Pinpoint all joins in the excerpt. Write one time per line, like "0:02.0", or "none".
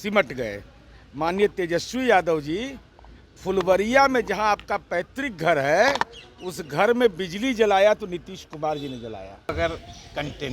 0:09.5